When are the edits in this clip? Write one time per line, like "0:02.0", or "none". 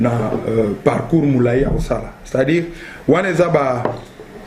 none